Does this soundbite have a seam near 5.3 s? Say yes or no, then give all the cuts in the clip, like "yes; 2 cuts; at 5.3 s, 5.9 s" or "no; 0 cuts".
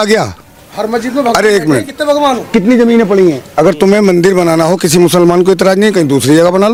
no; 0 cuts